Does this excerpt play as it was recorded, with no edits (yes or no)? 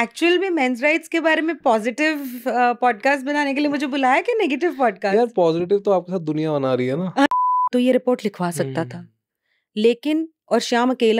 no